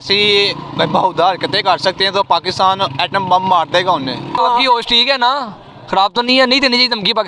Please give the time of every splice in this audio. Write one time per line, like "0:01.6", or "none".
0:04.4